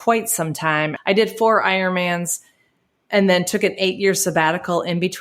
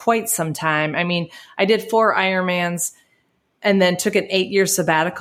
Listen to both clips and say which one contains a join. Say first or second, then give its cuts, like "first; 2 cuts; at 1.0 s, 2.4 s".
first; 1 cut; at 0.9 s